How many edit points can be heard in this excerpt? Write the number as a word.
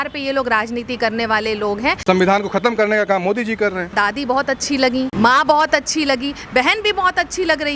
three